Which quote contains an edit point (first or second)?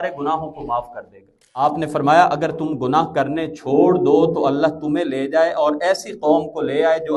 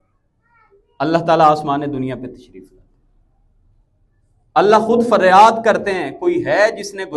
first